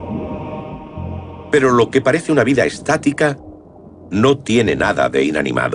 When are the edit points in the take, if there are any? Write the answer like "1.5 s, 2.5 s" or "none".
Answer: none